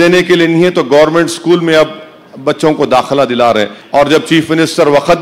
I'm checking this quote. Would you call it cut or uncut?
cut